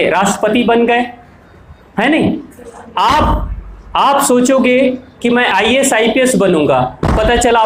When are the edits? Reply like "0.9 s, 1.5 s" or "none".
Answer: none